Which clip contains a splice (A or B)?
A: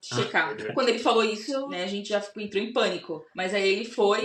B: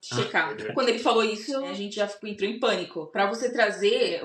B